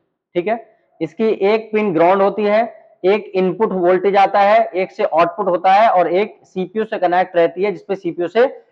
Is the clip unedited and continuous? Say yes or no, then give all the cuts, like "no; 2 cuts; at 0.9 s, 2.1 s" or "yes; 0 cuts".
yes; 0 cuts